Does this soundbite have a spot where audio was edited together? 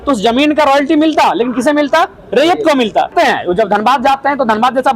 yes; 1 cut; at 3.1 s

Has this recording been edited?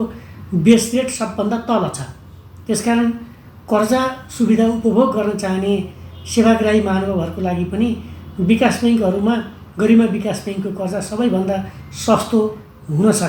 no; 0 cuts

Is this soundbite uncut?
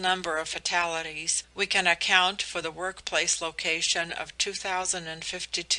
no; 1 cut; at 2.5 s

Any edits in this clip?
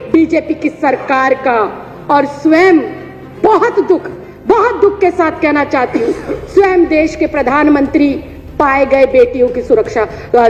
no; 0 cuts

